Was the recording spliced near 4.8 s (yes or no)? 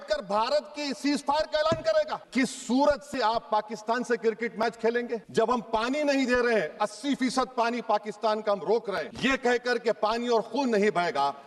no